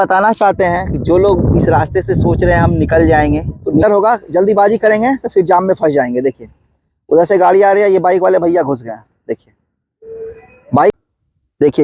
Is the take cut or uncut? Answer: cut